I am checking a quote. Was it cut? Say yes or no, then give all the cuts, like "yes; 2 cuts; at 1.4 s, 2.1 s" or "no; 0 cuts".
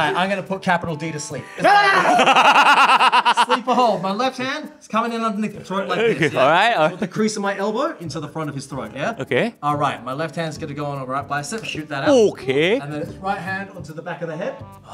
yes; 1 cut; at 1.6 s